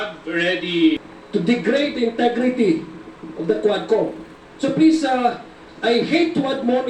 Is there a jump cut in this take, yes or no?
yes